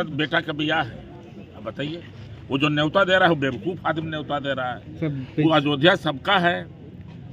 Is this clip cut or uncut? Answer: uncut